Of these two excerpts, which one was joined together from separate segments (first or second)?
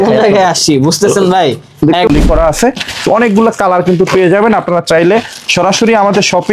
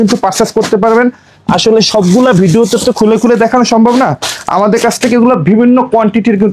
first